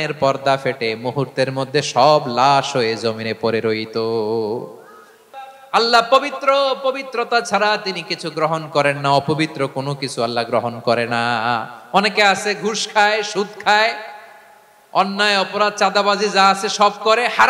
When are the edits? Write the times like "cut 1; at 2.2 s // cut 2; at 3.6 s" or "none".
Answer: cut 1; at 5.3 s